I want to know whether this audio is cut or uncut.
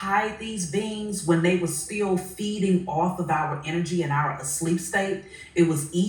uncut